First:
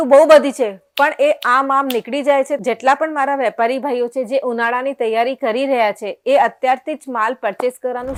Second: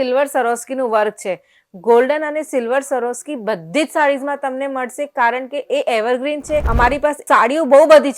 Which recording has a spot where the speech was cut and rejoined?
second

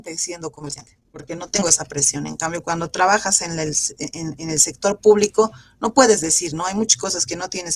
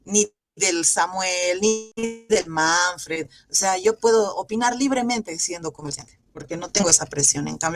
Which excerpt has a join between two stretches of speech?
second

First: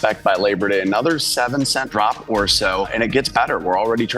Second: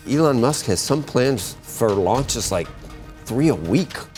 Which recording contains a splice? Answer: first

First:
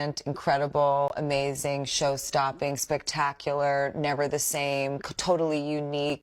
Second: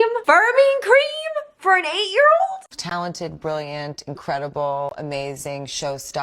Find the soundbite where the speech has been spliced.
second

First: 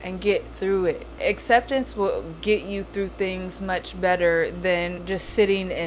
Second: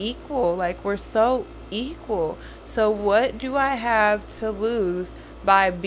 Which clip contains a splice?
first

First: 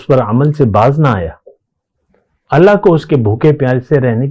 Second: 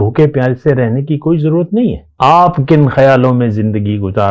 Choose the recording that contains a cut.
second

